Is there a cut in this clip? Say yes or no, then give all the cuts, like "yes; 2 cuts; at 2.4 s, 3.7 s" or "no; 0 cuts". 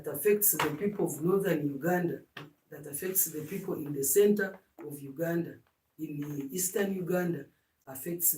no; 0 cuts